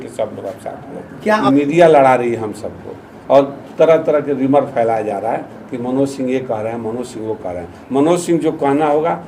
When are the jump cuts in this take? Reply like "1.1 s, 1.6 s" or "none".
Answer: 1.4 s